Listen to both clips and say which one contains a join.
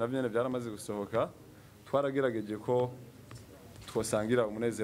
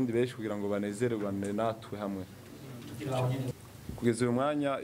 second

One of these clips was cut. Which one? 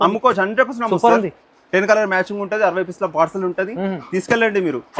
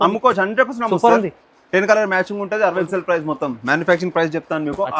second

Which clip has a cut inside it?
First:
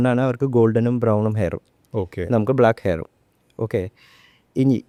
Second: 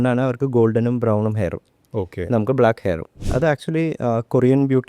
second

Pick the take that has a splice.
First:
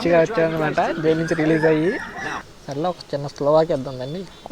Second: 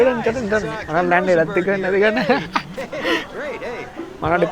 first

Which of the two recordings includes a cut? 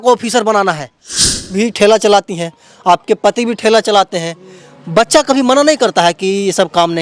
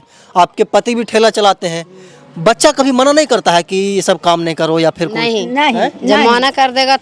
first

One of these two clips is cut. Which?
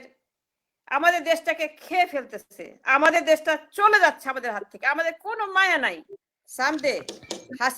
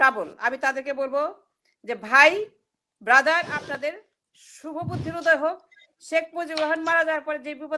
first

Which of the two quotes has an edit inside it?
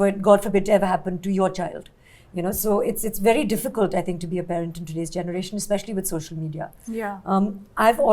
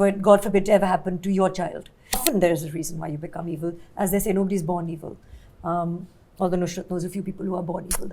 second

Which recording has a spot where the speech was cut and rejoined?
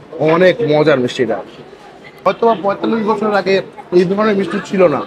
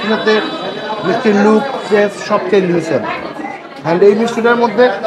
first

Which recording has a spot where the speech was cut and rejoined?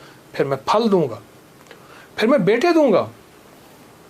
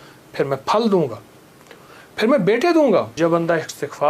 second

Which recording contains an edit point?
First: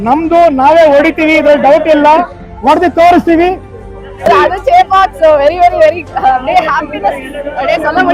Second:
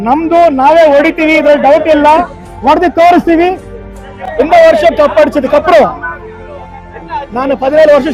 first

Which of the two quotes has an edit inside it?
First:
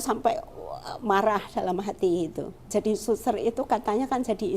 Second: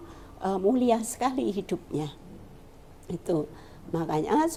first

